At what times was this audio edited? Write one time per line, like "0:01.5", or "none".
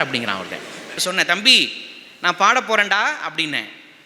0:01.0